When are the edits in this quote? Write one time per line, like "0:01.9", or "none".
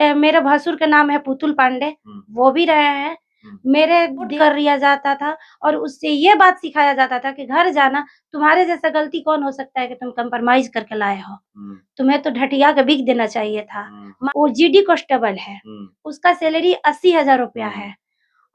0:04.3
0:14.1